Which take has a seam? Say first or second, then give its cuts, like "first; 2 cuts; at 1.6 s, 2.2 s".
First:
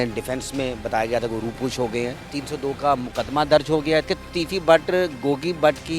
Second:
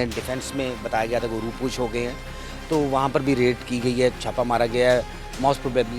first; 2 cuts; at 2.2 s, 4.1 s